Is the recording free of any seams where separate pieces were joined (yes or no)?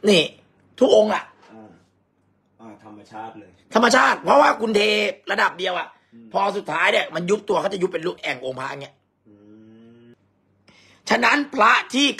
no